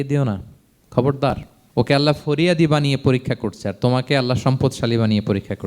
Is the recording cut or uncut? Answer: cut